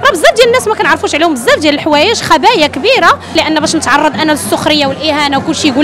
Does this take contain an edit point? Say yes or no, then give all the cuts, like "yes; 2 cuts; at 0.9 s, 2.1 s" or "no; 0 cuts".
yes; 1 cut; at 3.3 s